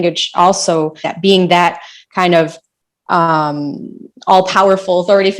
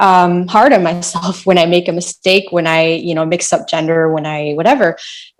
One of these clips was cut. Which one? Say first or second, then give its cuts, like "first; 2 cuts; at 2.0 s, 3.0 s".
first; 1 cut; at 1.0 s